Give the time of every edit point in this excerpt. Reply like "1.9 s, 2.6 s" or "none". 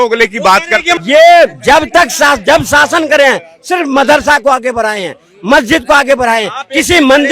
1.0 s

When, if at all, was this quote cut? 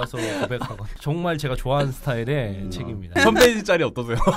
0.9 s, 3.1 s

